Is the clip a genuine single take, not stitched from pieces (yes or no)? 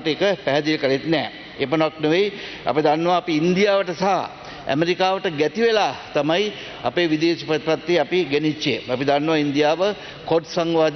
yes